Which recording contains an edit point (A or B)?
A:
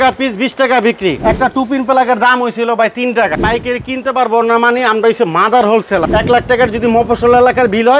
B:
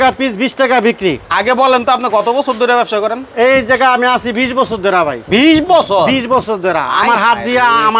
A